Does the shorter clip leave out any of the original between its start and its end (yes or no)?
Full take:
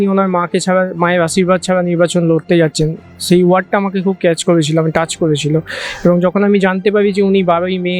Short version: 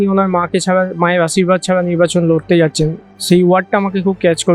no